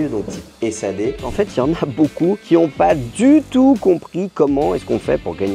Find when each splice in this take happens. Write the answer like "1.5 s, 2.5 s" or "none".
1.2 s, 2.4 s